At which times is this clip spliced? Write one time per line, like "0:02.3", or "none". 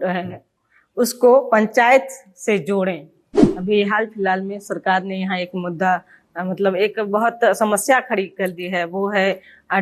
0:03.4